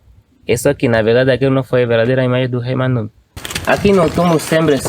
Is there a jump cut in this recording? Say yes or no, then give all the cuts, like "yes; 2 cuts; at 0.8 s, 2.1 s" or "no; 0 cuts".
yes; 1 cut; at 3.5 s